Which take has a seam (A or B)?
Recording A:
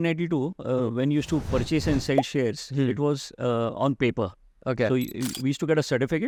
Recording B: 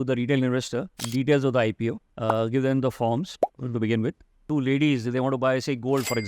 B